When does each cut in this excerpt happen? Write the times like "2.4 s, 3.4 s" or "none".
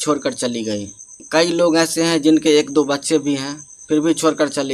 none